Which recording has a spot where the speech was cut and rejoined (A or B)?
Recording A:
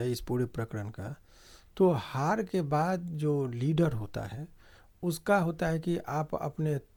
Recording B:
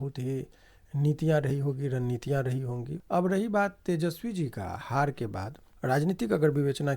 B